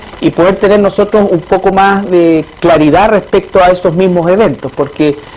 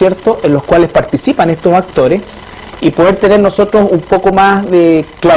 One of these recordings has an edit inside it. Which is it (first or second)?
first